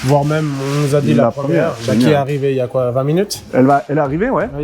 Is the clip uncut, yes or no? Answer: no